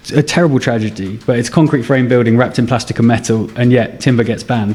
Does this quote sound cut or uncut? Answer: uncut